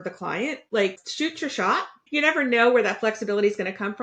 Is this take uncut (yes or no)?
no